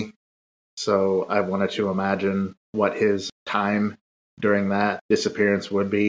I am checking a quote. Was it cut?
yes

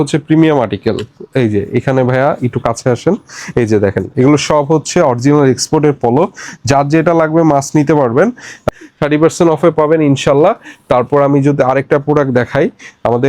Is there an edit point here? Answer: yes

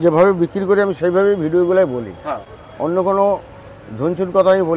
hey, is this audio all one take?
yes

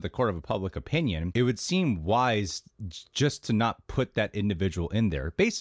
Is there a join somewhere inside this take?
yes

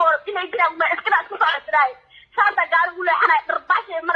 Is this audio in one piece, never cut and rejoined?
yes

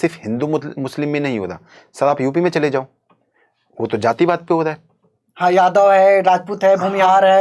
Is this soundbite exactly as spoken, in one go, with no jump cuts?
yes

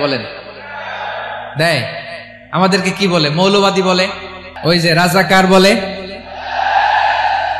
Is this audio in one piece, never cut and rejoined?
no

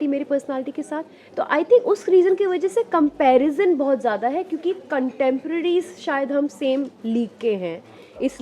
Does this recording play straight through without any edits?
no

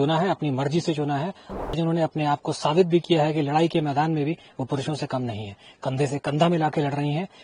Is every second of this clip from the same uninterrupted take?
no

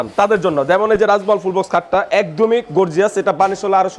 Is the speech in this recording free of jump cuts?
yes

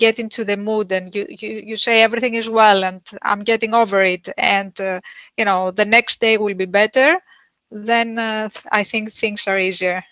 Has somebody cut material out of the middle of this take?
no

